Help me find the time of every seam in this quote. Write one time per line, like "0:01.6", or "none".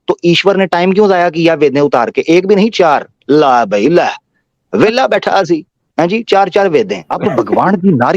0:07.0